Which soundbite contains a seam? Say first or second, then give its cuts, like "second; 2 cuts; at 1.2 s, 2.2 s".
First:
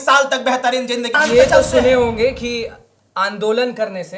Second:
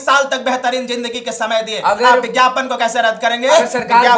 first; 1 cut; at 1.2 s